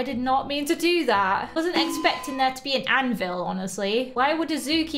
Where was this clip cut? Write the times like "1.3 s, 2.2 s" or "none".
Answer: none